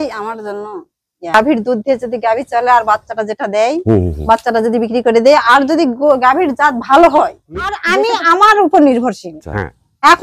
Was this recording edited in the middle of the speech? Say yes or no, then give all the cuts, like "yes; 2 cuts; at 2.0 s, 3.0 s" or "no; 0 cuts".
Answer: yes; 2 cuts; at 1.3 s, 8.0 s